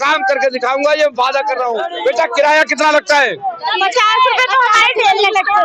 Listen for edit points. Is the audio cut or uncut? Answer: cut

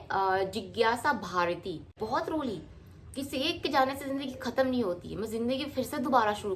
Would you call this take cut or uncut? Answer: cut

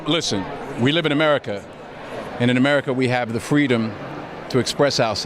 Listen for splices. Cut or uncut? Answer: uncut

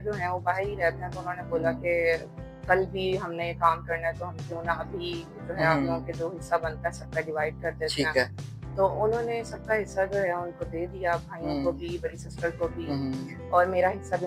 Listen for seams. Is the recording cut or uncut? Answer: uncut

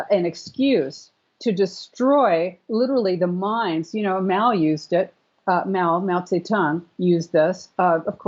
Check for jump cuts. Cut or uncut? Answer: uncut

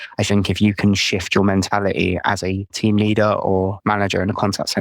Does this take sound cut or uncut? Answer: cut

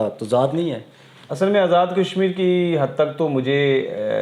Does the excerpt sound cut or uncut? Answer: uncut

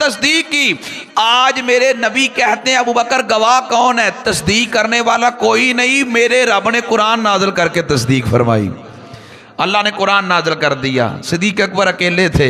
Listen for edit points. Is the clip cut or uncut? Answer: uncut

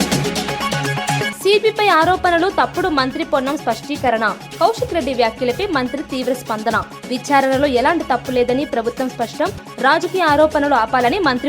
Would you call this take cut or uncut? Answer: cut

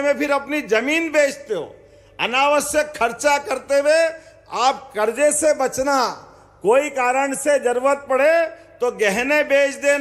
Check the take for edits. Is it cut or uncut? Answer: uncut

